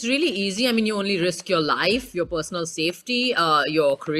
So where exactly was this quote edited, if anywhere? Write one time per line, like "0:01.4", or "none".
none